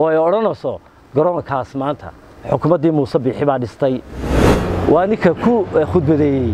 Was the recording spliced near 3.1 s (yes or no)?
no